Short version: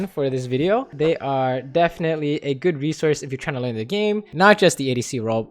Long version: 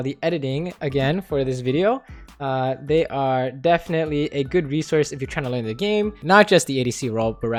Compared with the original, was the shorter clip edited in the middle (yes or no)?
yes